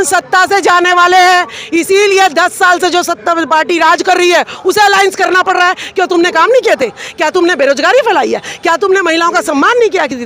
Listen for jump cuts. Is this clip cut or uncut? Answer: uncut